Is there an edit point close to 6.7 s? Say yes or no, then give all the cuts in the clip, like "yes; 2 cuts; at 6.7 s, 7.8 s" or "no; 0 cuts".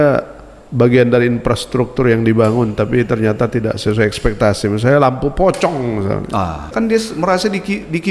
yes; 1 cut; at 6.7 s